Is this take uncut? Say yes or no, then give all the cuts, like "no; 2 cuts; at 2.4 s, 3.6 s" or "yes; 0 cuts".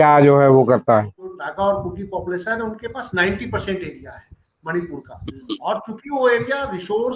no; 1 cut; at 1.4 s